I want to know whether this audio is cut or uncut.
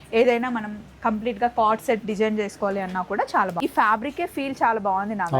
cut